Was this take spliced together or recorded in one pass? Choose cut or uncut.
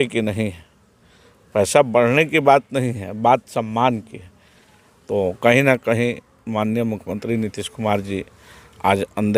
uncut